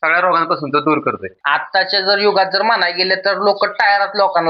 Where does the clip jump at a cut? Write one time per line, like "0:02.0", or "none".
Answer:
0:01.7